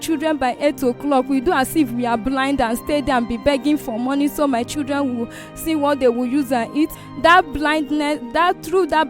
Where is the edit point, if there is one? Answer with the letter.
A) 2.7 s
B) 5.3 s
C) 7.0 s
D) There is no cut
C